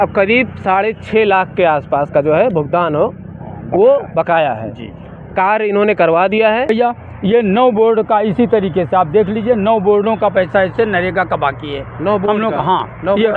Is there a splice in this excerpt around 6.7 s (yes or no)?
yes